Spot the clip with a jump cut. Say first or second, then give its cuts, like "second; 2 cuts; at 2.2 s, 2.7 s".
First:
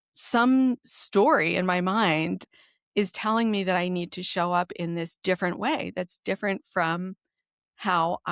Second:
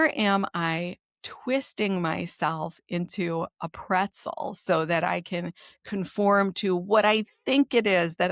first; 1 cut; at 2.4 s